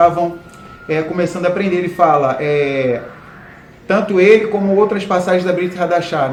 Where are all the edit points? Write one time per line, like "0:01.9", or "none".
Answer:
none